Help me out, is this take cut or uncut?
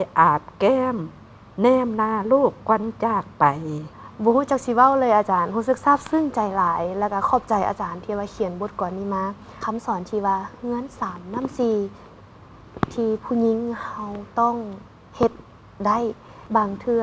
cut